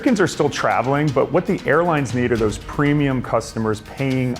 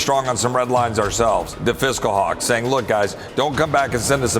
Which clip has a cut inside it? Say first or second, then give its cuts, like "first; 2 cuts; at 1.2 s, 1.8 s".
second; 1 cut; at 1.5 s